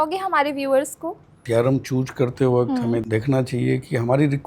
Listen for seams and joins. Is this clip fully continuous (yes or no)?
no